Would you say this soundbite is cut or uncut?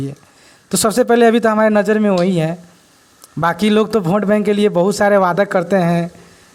uncut